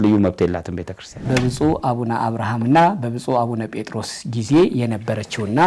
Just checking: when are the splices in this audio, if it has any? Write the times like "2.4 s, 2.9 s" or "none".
1.3 s